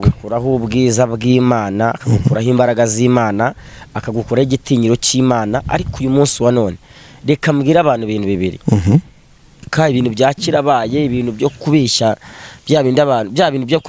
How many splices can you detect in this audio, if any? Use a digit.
1